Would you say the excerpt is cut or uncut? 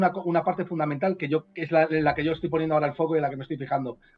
uncut